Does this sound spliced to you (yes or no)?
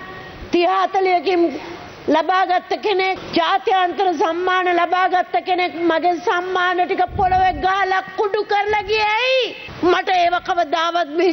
yes